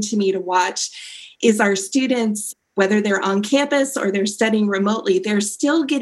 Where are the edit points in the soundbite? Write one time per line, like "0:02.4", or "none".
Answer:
0:02.7

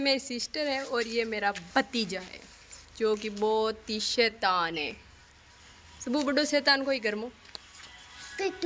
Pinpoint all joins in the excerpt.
none

